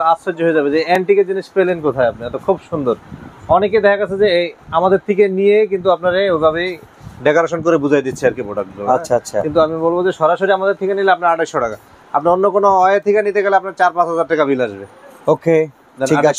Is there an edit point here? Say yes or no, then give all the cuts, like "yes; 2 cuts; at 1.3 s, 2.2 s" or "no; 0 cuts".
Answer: no; 0 cuts